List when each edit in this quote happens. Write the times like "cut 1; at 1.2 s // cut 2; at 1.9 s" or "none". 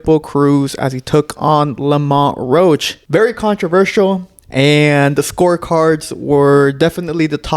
cut 1; at 2.9 s